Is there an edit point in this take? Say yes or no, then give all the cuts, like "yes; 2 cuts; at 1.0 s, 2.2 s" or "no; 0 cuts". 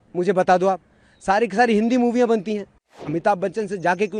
yes; 1 cut; at 3.0 s